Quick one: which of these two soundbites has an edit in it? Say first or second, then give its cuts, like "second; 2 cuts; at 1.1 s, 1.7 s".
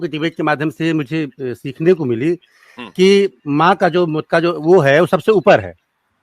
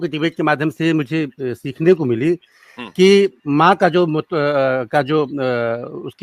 first; 1 cut; at 4.2 s